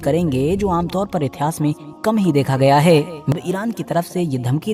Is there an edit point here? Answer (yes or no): yes